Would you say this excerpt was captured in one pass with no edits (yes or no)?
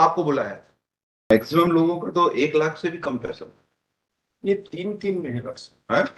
no